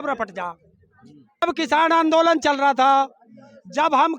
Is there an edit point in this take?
yes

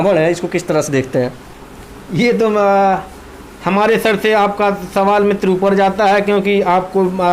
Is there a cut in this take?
no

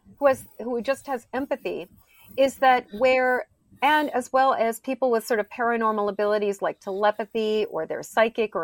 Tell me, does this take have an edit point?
no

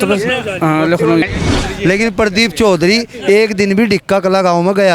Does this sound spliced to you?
yes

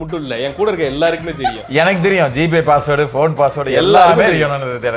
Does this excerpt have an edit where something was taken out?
no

